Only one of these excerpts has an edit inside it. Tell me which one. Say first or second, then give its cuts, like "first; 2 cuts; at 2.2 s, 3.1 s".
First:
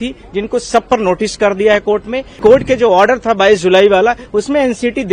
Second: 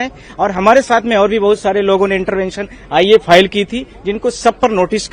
first; 1 cut; at 2.4 s